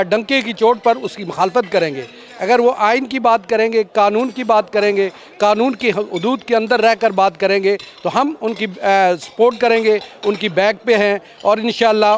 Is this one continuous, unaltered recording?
yes; 0 cuts

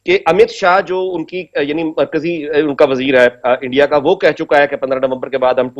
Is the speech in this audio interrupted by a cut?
no; 0 cuts

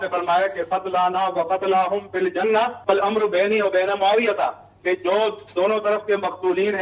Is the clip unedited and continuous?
yes; 0 cuts

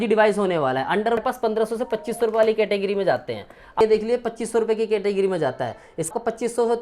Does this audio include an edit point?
yes; 3 cuts; at 1.2 s, 3.8 s, 6.1 s

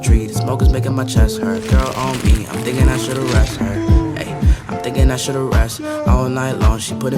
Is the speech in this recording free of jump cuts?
yes; 0 cuts

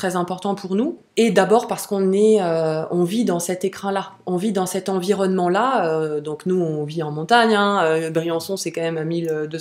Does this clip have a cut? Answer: yes; 1 cut; at 1.0 s

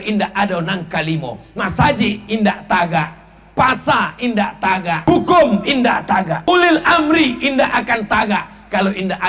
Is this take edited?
yes; 2 cuts; at 5.1 s, 6.5 s

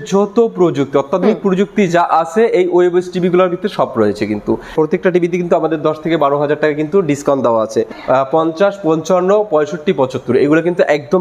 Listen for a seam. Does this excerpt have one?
yes; 2 cuts; at 4.7 s, 7.9 s

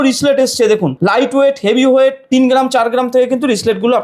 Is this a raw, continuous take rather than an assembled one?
no; 2 cuts; at 0.9 s, 2.3 s

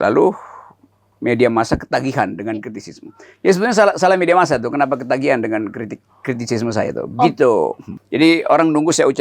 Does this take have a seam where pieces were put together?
yes; 1 cut; at 7.9 s

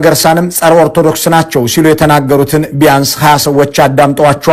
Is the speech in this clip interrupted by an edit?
no; 0 cuts

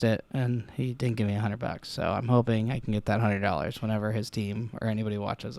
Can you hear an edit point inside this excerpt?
no; 0 cuts

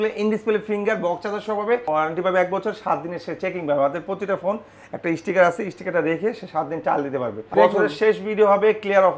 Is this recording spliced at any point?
yes; 2 cuts; at 1.8 s, 7.5 s

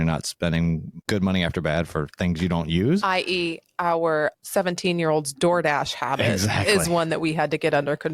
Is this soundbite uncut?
no; 1 cut; at 4.3 s

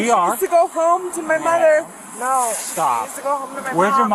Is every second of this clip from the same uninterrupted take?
yes; 0 cuts

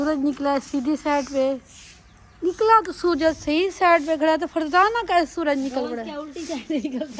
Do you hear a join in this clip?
no; 0 cuts

